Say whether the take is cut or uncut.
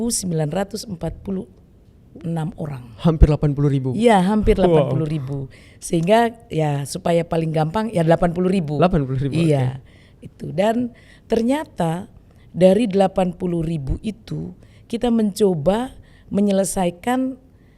uncut